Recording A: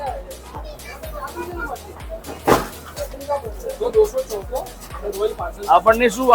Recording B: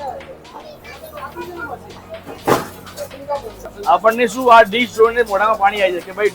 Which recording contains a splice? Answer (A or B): B